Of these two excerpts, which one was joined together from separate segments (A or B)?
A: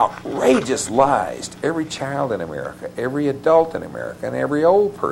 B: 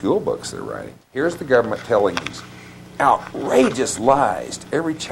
B